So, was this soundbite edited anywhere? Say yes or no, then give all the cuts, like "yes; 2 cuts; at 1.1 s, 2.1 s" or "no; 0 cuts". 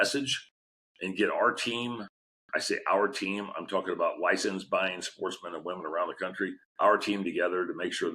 yes; 1 cut; at 6.6 s